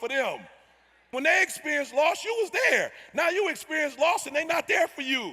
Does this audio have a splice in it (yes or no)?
yes